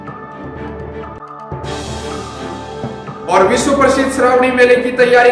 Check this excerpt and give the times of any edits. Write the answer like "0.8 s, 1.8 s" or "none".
3.1 s